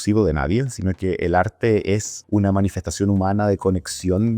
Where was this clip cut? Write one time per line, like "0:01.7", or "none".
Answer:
0:02.1